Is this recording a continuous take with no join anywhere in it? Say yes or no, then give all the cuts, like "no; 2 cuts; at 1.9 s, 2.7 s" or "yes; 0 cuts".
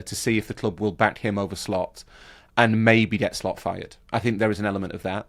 yes; 0 cuts